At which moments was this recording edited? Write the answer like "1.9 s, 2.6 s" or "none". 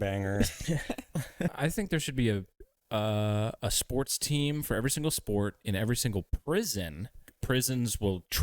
1.6 s, 7.3 s